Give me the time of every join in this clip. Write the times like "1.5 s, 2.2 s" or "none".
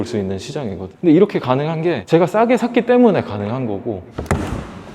none